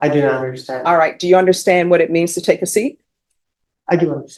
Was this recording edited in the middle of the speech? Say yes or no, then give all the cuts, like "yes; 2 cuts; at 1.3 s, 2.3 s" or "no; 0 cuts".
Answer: no; 0 cuts